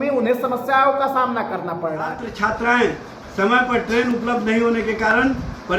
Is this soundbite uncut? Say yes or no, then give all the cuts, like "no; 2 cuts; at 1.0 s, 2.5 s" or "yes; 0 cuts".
no; 1 cut; at 2.3 s